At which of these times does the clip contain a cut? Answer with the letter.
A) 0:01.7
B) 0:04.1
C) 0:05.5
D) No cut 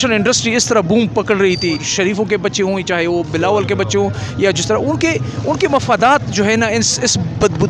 A